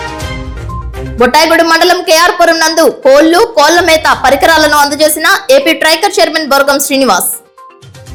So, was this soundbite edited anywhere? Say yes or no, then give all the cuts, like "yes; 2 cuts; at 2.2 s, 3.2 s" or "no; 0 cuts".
no; 0 cuts